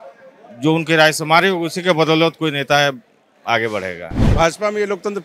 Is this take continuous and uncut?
no; 1 cut; at 4.2 s

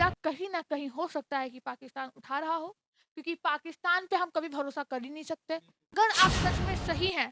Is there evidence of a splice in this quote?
yes; 1 cut; at 5.8 s

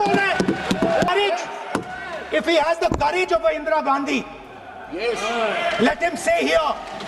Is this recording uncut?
no; 1 cut; at 1.1 s

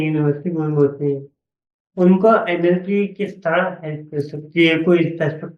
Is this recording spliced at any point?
no; 0 cuts

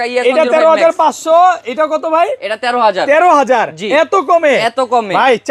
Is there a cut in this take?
no; 0 cuts

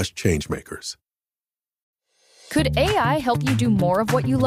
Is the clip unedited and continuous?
yes; 0 cuts

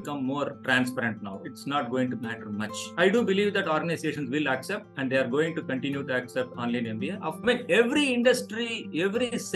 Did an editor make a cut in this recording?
yes; 1 cut; at 7.3 s

